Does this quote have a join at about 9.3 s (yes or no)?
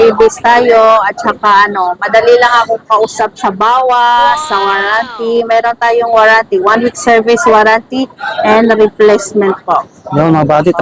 no